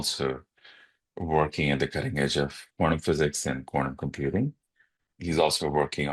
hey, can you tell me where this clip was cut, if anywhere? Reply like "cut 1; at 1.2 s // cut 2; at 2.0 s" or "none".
cut 1; at 2.6 s // cut 2; at 5.0 s